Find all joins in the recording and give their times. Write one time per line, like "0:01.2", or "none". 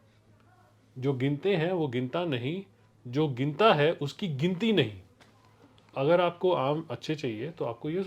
0:05.9